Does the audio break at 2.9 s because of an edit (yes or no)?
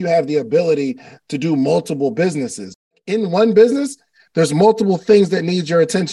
yes